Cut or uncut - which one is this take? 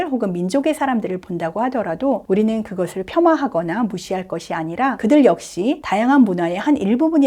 cut